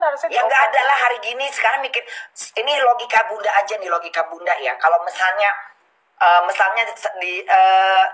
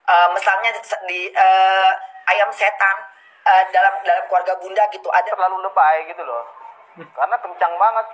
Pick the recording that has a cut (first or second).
second